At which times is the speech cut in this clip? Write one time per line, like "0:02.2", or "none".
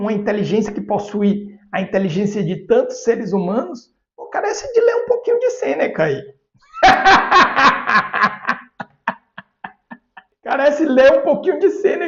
0:10.3